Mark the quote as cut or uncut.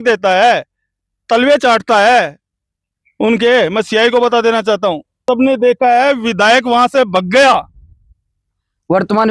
cut